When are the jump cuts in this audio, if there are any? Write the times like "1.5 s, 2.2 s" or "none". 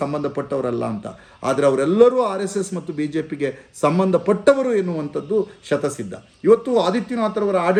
none